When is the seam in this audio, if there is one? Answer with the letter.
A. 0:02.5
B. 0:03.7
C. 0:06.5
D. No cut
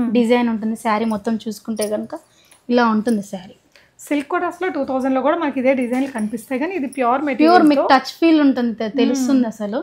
D